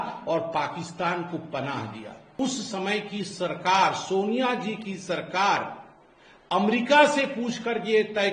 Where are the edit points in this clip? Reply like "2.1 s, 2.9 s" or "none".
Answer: 2.3 s